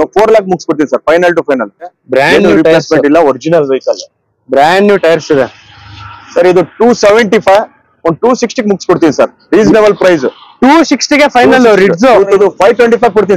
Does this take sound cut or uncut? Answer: cut